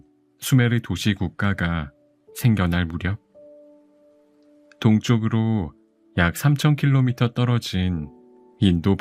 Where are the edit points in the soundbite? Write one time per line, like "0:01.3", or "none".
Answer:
0:03.3
0:04.6